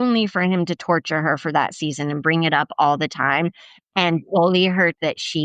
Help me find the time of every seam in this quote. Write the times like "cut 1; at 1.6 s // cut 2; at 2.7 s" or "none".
none